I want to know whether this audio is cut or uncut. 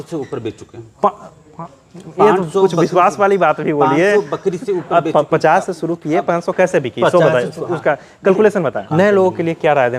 cut